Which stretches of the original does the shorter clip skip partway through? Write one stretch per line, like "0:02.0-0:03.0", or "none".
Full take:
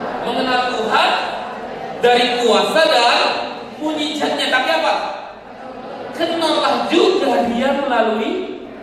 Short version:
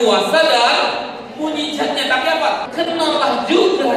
0:05.1-0:06.1